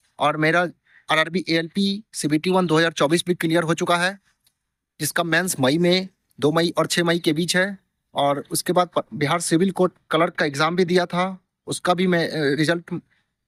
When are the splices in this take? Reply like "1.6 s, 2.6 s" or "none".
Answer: none